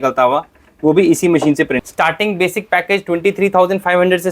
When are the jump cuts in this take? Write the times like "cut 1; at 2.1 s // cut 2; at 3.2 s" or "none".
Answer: cut 1; at 1.8 s